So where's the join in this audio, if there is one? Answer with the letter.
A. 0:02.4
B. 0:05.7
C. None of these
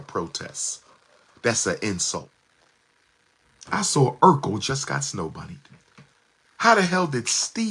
A